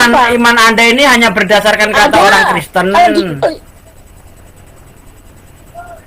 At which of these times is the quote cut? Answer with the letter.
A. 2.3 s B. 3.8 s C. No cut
C